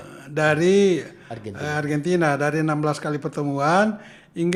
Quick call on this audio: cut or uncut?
uncut